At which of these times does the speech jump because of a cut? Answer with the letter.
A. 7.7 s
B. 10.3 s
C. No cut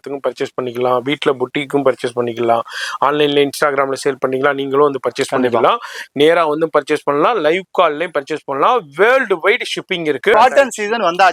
B